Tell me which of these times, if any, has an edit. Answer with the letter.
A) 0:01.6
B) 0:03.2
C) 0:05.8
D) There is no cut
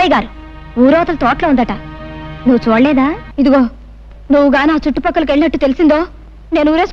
B